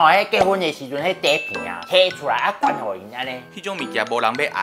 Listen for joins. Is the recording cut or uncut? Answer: cut